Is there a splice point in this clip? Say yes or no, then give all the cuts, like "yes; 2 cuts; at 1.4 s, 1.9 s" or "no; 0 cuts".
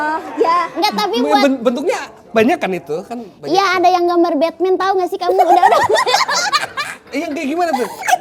no; 0 cuts